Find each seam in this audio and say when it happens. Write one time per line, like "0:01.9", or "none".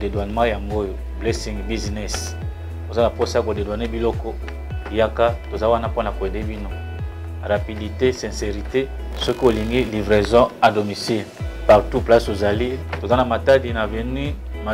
none